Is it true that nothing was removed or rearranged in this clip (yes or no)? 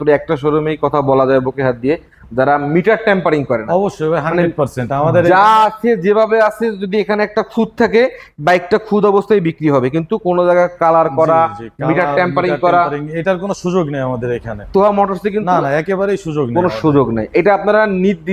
yes